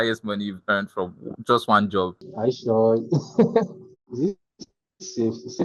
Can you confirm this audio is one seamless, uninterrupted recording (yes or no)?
no